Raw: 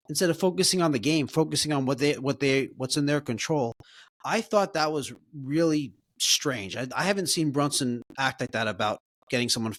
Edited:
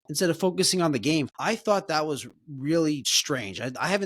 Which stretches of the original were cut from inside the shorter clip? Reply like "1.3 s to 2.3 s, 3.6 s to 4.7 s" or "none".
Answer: 1.3 s to 4.1 s, 6.0 s to 6.3 s